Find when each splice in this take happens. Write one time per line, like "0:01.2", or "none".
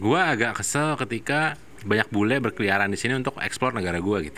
0:01.7